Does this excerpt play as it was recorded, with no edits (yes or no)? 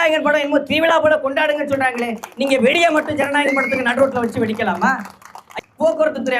no